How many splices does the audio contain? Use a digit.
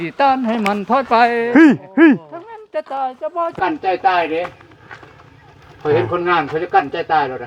1